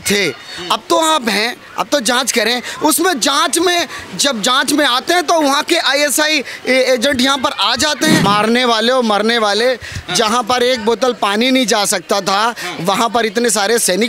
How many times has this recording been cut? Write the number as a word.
one